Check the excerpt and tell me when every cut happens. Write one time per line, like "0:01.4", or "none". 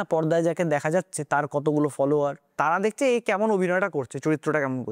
0:02.5